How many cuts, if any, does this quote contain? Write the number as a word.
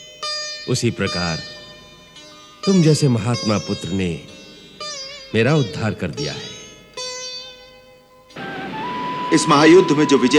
one